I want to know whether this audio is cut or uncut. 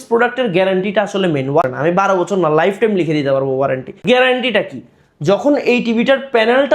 cut